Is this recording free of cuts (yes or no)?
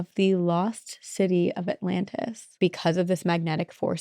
no